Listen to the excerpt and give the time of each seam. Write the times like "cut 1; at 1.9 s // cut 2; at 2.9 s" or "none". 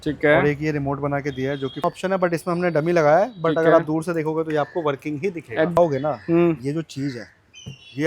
cut 1; at 1.8 s // cut 2; at 5.8 s